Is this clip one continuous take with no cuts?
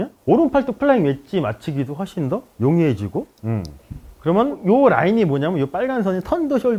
yes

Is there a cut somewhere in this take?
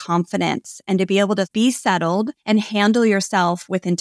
yes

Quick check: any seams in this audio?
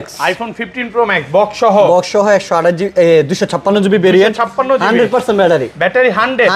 no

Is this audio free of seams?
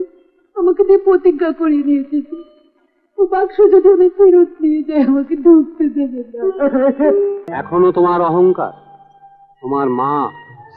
no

